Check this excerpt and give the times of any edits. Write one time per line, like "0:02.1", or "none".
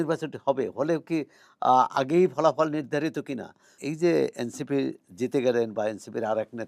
0:03.8